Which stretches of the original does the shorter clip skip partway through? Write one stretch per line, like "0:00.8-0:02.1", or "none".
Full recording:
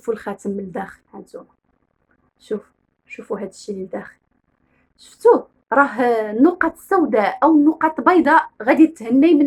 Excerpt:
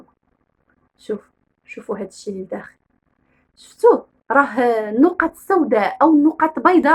none